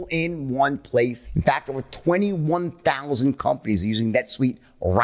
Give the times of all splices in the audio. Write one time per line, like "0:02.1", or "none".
0:01.2